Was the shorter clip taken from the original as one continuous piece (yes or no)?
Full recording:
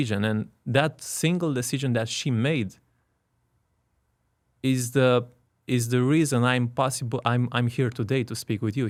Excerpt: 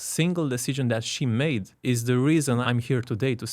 no